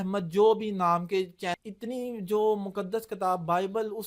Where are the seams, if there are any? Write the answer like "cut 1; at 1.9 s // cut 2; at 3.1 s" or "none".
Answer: cut 1; at 1.6 s